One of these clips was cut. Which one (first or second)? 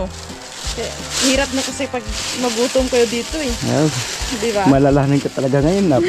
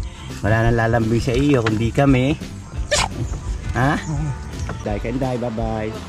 second